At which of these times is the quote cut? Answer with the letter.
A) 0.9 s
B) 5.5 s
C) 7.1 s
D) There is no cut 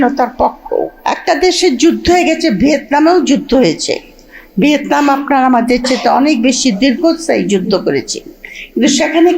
A